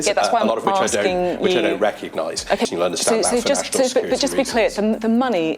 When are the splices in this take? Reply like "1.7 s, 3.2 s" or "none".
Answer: 2.7 s